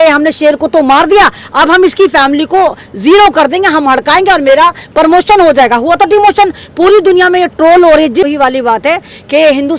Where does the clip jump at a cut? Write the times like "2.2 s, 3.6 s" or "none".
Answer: 8.2 s